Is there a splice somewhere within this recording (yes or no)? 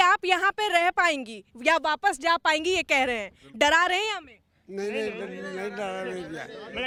no